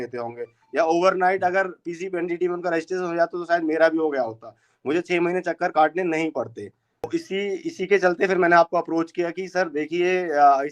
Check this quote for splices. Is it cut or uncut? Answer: cut